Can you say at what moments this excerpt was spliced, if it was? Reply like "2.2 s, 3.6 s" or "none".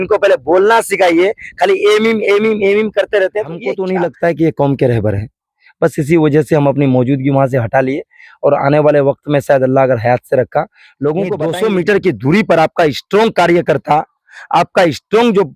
3.7 s, 11.3 s